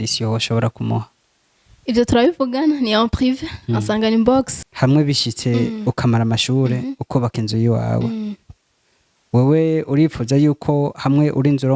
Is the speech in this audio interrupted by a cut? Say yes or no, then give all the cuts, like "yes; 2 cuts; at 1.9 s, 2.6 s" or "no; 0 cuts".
yes; 1 cut; at 4.6 s